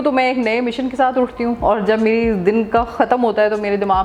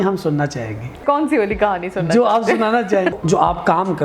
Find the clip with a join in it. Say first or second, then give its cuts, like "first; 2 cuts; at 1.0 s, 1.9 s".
second; 2 cuts; at 1.0 s, 3.1 s